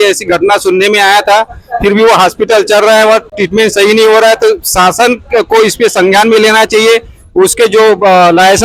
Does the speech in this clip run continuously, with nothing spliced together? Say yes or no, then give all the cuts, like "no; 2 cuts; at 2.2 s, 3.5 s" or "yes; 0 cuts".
yes; 0 cuts